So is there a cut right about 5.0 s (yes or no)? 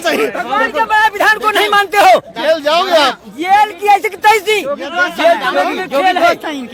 no